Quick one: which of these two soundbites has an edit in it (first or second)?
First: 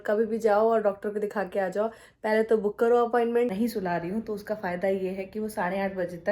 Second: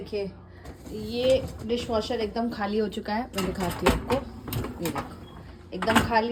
first